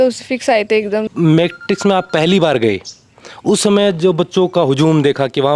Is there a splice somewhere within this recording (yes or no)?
yes